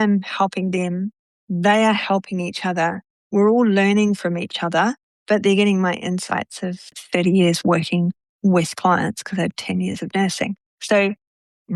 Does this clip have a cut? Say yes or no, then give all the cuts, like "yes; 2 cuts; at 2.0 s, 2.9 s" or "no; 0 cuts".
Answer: no; 0 cuts